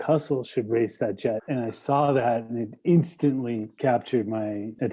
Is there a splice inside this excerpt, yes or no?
yes